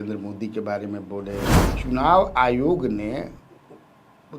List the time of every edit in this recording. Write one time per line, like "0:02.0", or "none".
0:01.7